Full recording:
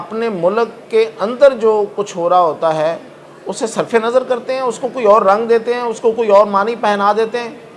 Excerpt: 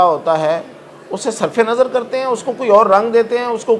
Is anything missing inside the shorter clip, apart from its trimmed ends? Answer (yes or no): no